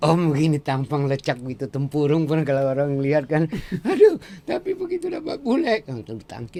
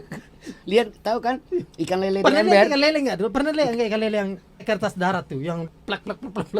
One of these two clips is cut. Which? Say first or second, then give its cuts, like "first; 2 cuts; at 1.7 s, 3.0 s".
second; 2 cuts; at 4.6 s, 5.7 s